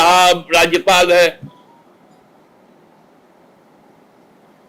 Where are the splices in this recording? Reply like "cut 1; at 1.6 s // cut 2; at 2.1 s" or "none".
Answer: none